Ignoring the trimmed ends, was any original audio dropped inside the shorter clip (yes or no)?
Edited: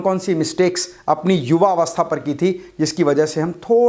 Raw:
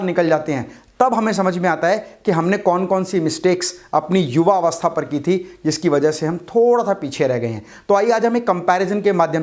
no